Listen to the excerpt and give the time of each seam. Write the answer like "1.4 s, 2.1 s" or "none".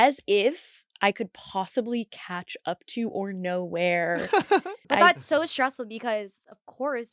4.8 s